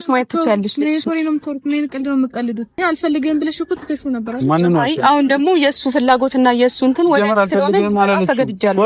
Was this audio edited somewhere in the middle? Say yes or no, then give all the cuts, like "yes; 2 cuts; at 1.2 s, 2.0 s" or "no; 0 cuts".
yes; 1 cut; at 2.8 s